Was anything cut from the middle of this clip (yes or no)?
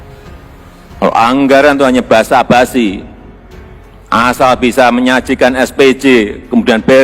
yes